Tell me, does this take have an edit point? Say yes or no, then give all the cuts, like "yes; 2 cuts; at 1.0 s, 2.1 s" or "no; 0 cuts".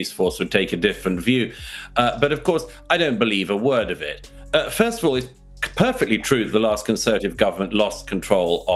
no; 0 cuts